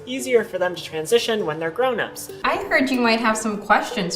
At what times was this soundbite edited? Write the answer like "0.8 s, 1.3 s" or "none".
2.3 s